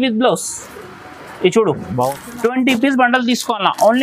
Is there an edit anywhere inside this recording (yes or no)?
yes